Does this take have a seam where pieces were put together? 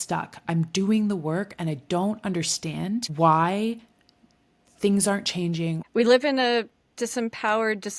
yes; 2 cuts; at 3.1 s, 5.8 s

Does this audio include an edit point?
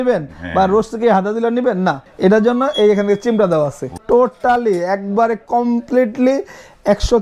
yes; 2 cuts; at 2.1 s, 3.9 s

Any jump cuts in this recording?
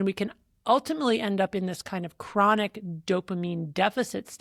no; 0 cuts

